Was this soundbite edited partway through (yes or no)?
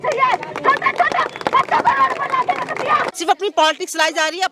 yes